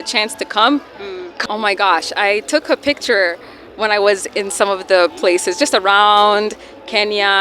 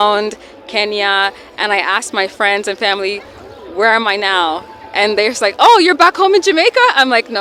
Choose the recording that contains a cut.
first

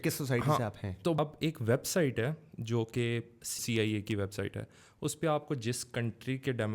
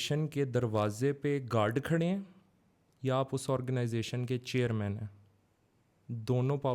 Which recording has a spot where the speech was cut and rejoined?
first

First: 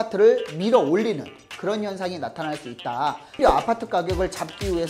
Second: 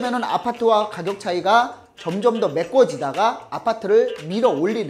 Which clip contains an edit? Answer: first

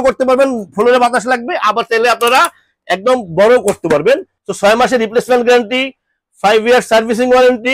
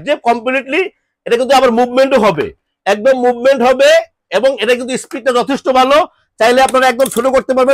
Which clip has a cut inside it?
first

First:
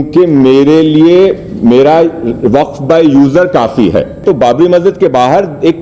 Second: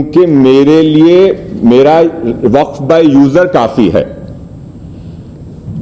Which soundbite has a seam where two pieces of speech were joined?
first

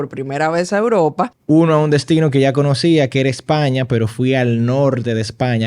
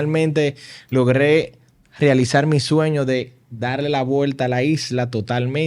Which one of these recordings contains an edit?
first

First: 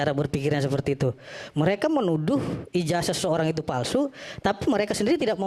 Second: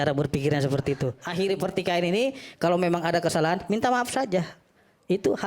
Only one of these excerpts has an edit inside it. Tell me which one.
second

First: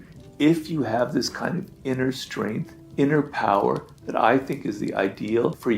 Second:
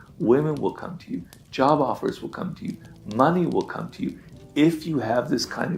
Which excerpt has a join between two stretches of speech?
first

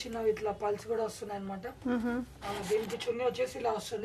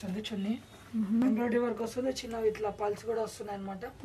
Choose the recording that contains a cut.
second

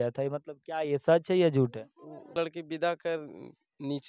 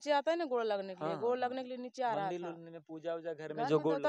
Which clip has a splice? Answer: first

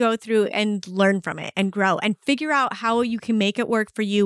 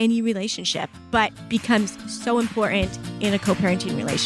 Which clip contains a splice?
second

